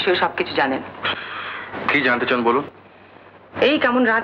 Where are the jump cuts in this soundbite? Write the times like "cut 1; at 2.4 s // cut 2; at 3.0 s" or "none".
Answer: none